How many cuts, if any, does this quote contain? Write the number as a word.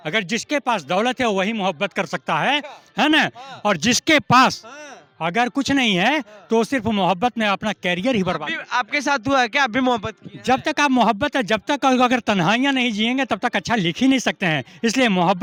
zero